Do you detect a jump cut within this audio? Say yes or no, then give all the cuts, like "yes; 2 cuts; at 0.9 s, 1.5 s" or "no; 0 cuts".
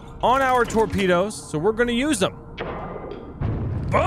yes; 1 cut; at 2.5 s